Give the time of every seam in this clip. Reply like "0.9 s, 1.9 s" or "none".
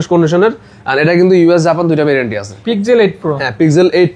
2.5 s